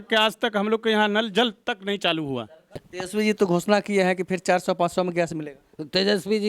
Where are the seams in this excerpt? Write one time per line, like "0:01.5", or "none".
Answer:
0:02.9